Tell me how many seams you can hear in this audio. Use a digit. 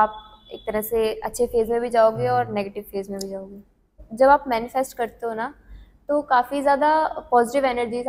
1